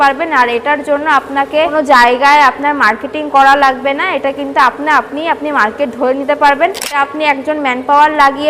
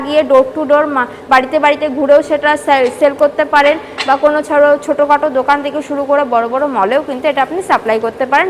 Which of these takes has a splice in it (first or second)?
first